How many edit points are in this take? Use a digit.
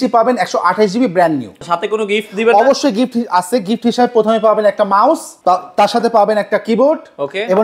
1